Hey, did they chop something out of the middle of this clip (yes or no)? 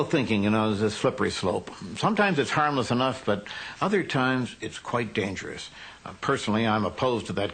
no